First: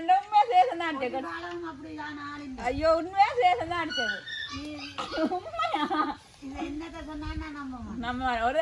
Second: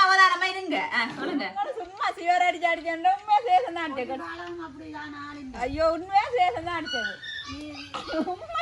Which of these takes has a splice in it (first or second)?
second